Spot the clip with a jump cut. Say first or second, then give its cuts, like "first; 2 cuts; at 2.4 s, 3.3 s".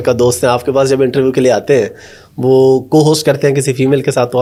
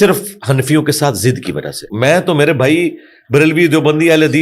second; 1 cut; at 1.9 s